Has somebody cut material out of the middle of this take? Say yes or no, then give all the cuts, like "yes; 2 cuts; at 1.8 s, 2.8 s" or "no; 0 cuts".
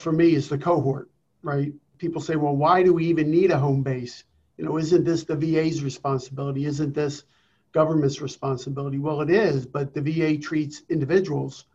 yes; 1 cut; at 1.8 s